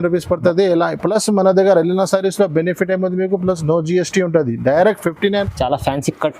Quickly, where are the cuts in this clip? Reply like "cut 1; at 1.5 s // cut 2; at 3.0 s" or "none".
cut 1; at 5.4 s